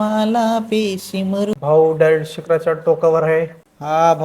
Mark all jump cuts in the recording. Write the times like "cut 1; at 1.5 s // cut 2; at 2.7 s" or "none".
cut 1; at 1.5 s